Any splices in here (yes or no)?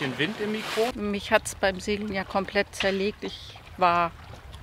yes